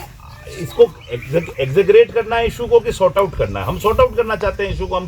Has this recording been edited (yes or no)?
no